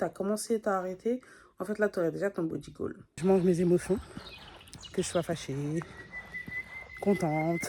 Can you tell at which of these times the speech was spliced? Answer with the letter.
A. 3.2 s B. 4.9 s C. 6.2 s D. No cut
A